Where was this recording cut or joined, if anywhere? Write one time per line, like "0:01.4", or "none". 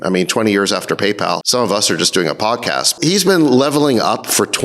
0:01.4
0:02.9

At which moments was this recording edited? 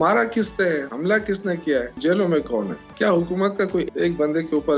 0:00.9
0:02.0
0:02.8
0:03.9

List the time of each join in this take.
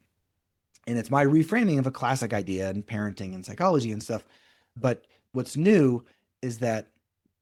none

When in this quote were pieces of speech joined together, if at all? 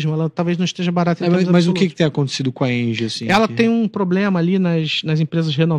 none

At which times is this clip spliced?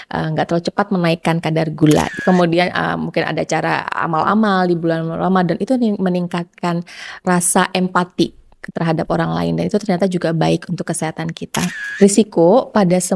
0:02.2
0:07.2
0:11.8

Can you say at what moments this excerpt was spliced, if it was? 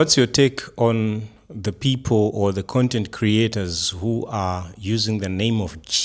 none

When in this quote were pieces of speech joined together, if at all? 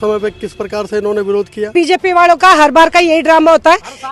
0:01.7

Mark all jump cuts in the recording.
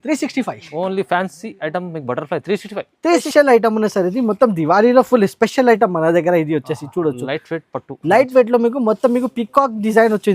0:03.3

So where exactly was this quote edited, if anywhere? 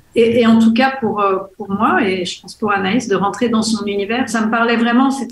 0:04.3

